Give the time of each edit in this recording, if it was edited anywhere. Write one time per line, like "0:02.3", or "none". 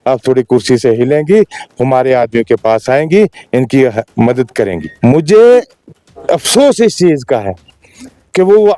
0:04.9